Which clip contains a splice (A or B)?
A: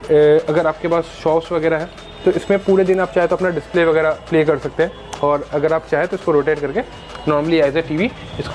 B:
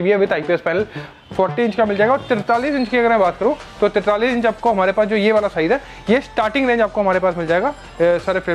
B